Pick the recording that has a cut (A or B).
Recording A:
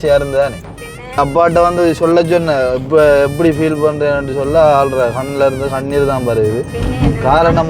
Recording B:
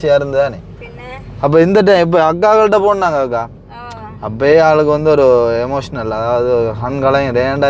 A